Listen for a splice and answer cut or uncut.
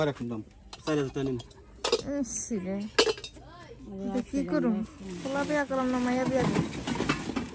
uncut